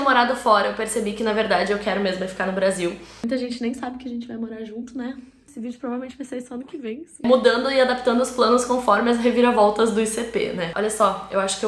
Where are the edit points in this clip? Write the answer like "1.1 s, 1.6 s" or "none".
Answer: 3.2 s, 5.5 s, 7.2 s, 10.7 s